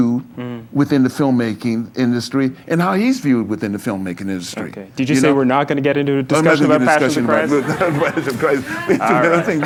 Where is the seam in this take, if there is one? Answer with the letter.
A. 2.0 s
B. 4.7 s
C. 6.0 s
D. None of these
D